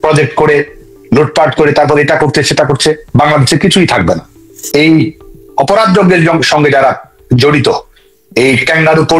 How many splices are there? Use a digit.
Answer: 1